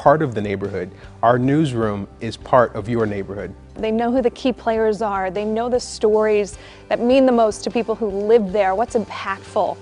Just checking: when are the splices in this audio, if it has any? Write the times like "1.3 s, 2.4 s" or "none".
none